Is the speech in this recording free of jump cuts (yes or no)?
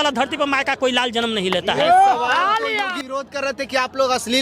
no